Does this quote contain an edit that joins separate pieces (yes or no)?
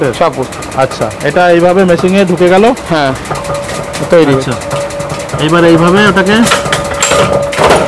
no